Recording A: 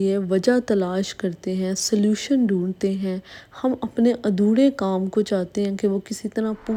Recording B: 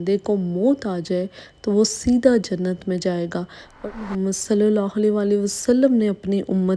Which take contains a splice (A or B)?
B